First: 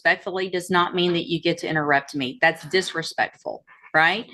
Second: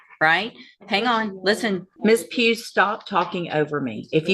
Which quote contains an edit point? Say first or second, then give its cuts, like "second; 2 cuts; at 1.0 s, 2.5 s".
second; 1 cut; at 1.9 s